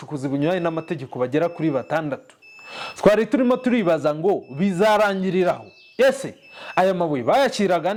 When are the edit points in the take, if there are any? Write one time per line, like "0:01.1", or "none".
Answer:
none